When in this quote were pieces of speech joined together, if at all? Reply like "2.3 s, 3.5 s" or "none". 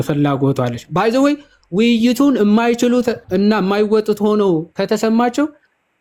none

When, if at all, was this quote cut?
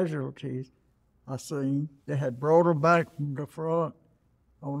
2.0 s

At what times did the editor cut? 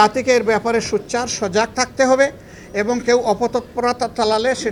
none

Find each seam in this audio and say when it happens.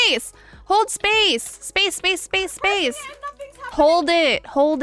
none

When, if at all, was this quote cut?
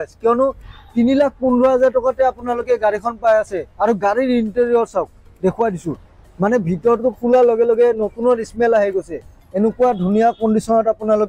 none

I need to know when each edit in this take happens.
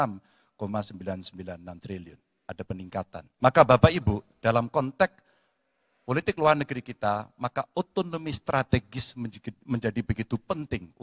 3.2 s

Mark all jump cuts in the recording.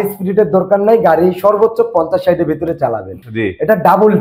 3.1 s

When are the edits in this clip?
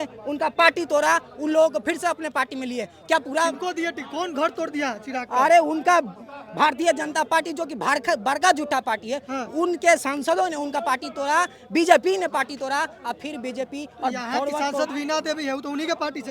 none

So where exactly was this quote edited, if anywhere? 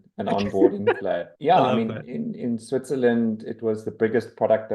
1.3 s, 2.1 s

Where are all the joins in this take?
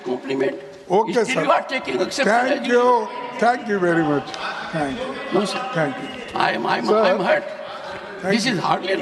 none

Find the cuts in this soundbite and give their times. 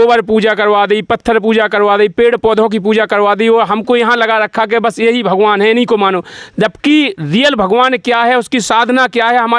none

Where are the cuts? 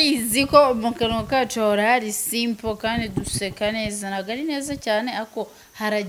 none

